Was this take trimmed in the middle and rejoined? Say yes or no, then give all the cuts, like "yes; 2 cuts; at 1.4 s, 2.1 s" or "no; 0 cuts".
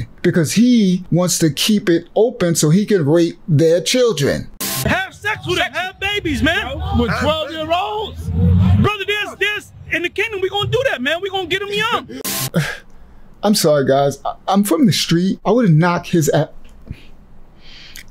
yes; 3 cuts; at 4.5 s, 12.2 s, 15.4 s